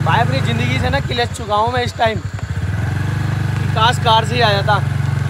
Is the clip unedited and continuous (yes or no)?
yes